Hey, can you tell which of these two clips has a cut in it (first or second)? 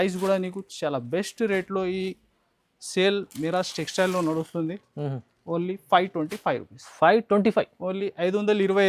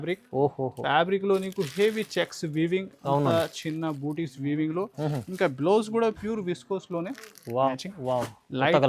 second